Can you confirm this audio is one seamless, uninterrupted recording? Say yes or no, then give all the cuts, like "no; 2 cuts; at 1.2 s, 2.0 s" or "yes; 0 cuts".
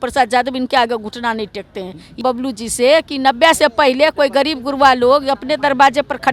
no; 1 cut; at 2.2 s